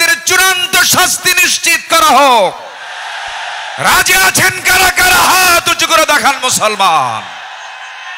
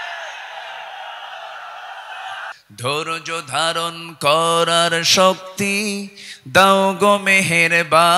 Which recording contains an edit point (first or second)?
second